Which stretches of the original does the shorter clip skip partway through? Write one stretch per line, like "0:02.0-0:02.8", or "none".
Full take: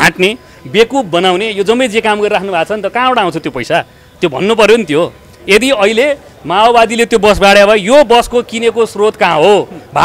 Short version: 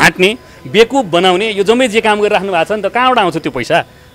none